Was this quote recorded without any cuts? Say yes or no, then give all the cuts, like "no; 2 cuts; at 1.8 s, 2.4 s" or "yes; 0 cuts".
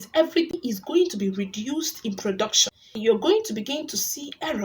no; 1 cut; at 3.0 s